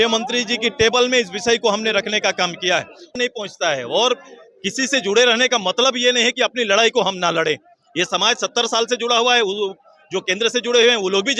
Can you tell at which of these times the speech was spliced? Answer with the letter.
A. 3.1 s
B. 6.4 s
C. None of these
A